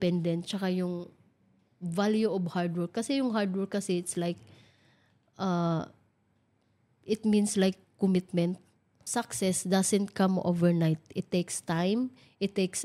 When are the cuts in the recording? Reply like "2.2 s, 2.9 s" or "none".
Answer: 8.9 s